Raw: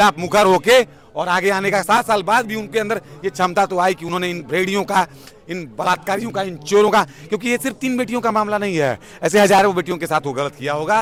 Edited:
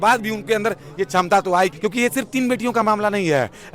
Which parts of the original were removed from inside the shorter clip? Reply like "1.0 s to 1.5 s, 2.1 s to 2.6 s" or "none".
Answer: 4.0 s to 7.2 s